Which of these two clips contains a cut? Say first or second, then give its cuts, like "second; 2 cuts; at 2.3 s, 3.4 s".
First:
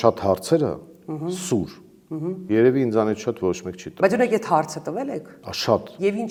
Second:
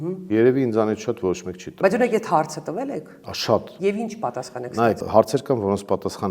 second; 1 cut; at 5.0 s